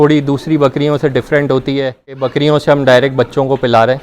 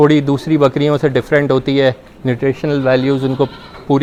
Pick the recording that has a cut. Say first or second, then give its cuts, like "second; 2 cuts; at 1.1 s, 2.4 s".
first; 1 cut; at 2.2 s